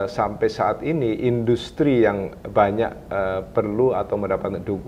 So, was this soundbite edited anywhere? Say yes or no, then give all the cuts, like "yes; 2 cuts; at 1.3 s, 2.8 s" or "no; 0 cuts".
no; 0 cuts